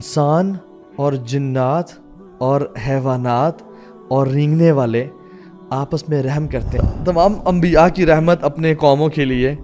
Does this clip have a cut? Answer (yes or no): yes